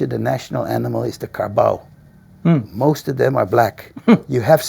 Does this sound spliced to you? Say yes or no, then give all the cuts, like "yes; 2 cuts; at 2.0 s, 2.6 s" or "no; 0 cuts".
no; 0 cuts